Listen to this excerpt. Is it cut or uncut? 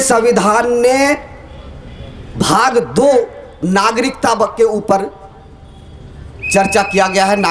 uncut